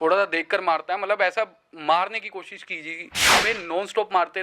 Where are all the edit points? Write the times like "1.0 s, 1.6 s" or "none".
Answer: 3.4 s